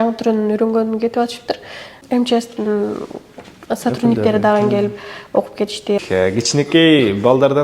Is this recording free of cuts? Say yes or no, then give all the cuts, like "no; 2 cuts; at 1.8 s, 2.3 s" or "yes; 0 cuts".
no; 2 cuts; at 2.0 s, 6.0 s